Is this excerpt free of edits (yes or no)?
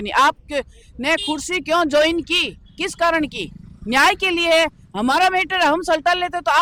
yes